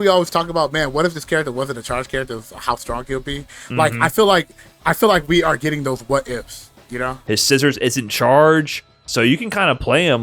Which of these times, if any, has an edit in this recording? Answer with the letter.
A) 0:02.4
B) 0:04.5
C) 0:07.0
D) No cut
C